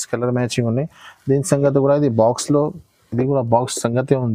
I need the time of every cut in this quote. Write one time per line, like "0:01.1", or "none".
none